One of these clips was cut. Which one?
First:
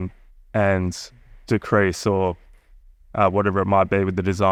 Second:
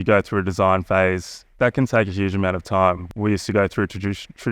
second; 2 cuts; at 1.5 s, 3.0 s

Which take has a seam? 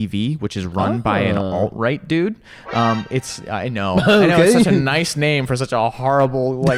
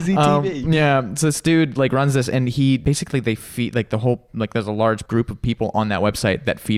second; 2 cuts; at 2.8 s, 5.0 s

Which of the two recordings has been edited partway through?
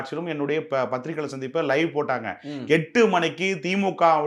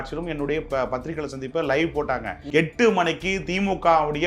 second; 1 cut; at 2.4 s

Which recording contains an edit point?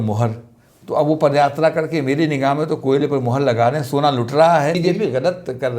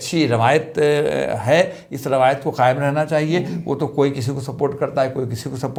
first; 1 cut; at 4.8 s

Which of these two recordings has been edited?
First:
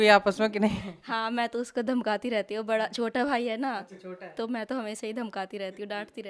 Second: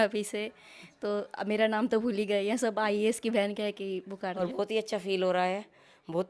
second; 1 cut; at 4.4 s

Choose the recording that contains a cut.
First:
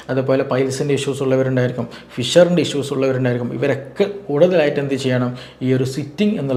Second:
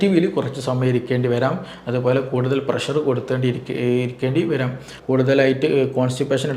second; 1 cut; at 4.9 s

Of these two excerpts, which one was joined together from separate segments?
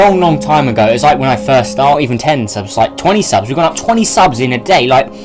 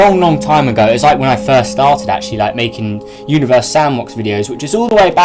second; 1 cut; at 2.0 s

